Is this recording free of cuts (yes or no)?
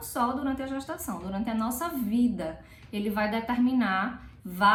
yes